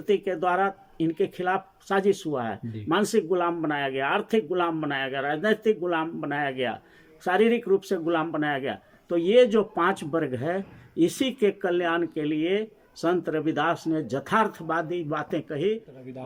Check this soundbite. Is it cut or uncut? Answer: uncut